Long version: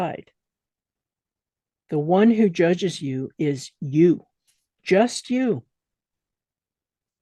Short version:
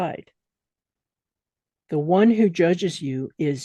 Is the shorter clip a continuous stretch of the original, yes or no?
yes